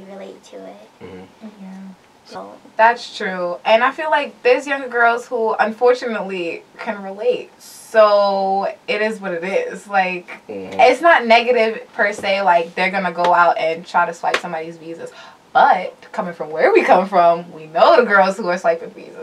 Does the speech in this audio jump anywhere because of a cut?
yes; 1 cut; at 2.1 s

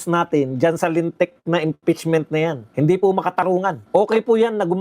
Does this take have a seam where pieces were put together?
yes; 2 cuts; at 2.6 s, 3.8 s

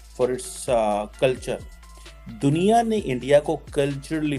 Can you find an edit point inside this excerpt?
no; 0 cuts

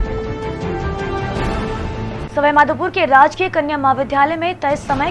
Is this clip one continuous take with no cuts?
no; 1 cut; at 2.0 s

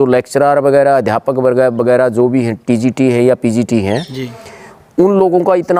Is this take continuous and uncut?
yes; 0 cuts

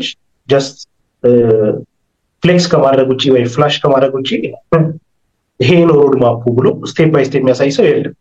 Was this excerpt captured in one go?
yes; 0 cuts

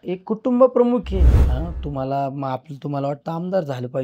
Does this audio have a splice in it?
yes; 1 cut; at 1.4 s

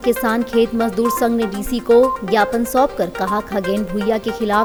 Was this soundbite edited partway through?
no; 0 cuts

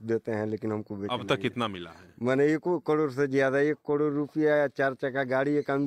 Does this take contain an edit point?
no; 0 cuts

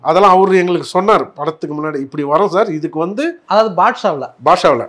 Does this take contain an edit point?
no; 0 cuts

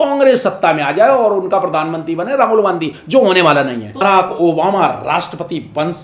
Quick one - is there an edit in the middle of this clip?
yes; 1 cut; at 4.0 s

